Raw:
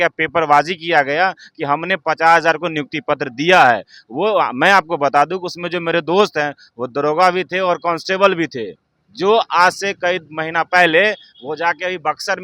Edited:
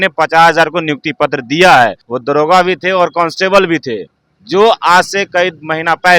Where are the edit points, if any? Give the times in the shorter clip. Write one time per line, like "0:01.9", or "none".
0:02.1